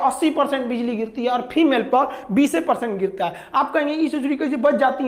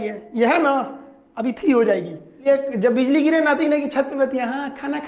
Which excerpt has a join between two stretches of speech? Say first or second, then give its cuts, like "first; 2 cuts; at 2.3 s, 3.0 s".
second; 1 cut; at 2.4 s